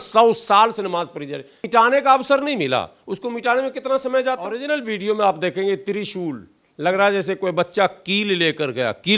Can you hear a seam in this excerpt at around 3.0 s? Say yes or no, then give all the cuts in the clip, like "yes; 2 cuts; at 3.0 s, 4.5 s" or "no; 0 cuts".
no; 2 cuts; at 1.6 s, 4.7 s